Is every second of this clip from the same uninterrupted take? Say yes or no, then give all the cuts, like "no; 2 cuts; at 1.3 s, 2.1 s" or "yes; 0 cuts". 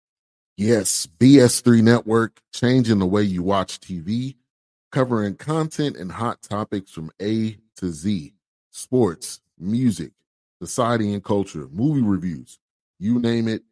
yes; 0 cuts